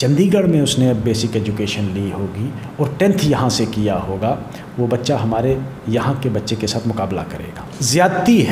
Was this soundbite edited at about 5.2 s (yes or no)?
no